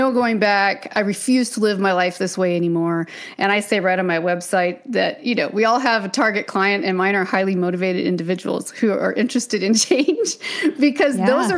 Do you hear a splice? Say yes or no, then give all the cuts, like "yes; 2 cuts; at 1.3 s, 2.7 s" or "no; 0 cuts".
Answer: no; 0 cuts